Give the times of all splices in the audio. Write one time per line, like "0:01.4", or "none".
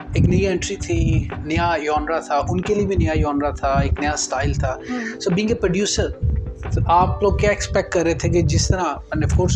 none